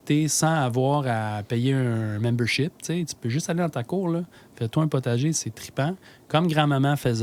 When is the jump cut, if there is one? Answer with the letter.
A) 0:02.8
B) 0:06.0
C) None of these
C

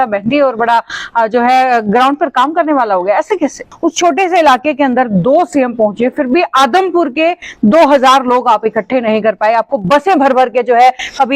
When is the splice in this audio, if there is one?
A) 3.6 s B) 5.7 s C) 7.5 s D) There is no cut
A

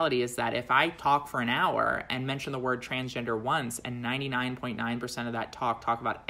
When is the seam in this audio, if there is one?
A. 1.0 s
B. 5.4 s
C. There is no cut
A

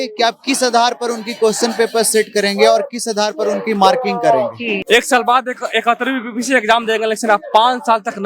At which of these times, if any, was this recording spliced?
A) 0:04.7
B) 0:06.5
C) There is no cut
A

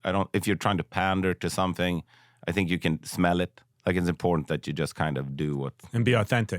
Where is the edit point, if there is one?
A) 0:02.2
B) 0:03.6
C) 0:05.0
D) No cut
B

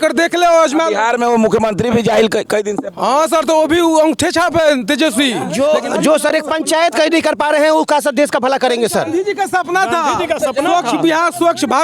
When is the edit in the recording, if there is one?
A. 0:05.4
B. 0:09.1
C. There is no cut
A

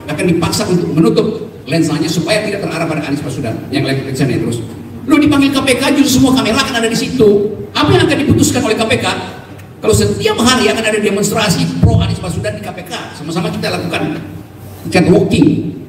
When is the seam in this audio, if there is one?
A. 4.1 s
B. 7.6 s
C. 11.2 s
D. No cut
B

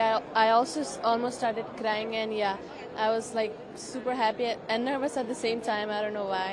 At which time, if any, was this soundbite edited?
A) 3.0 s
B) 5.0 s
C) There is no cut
C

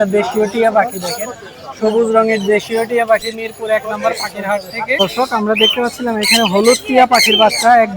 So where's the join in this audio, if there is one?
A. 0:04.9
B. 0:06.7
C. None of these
A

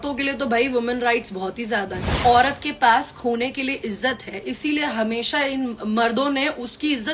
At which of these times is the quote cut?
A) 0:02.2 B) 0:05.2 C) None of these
A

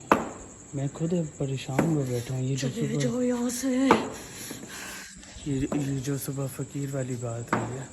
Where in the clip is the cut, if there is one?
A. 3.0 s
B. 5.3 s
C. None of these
C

